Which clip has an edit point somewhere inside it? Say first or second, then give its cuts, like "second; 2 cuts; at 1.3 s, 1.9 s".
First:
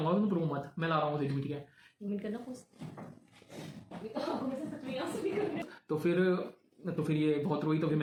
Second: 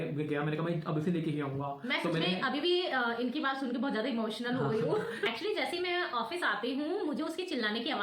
second; 1 cut; at 5.2 s